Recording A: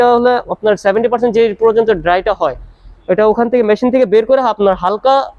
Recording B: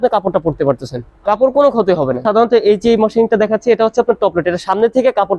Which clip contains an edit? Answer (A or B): B